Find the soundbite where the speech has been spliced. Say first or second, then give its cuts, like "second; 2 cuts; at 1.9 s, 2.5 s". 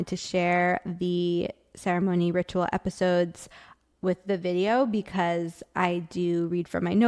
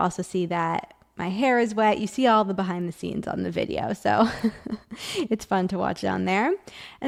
first; 1 cut; at 3.8 s